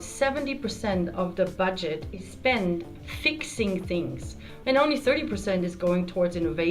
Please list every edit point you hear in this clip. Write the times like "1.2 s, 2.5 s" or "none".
2.9 s, 4.4 s